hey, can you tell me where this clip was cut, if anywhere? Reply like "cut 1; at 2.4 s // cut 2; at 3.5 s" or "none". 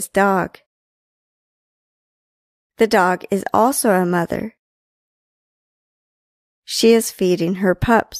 none

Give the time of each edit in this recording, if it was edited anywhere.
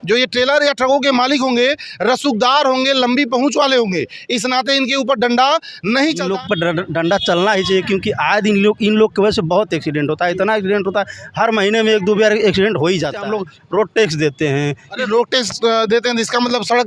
cut 1; at 6.3 s // cut 2; at 13.2 s

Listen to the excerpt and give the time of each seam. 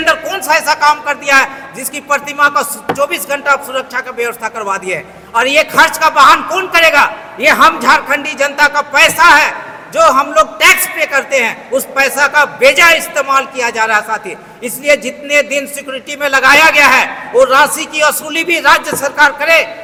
none

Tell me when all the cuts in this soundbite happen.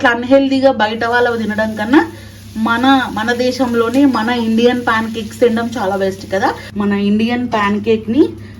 cut 1; at 6.6 s

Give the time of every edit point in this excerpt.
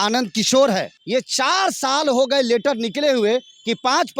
cut 1; at 0.9 s

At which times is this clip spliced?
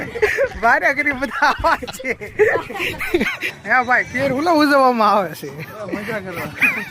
cut 1; at 3.4 s

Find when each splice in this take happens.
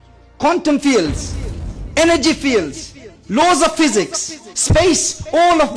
none

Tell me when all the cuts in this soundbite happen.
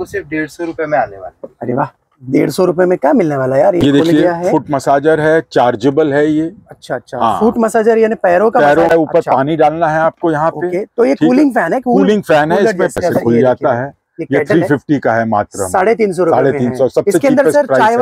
cut 1; at 3.8 s // cut 2; at 8.9 s // cut 3; at 12.9 s

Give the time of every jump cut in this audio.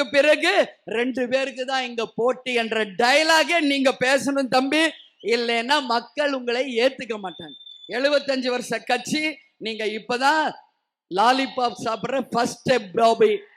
none

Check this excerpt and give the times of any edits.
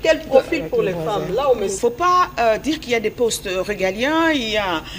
cut 1; at 1.7 s

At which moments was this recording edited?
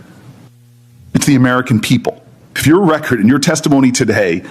cut 1; at 2.6 s

